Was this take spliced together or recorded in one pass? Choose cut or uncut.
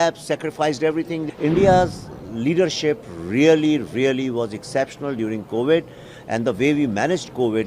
cut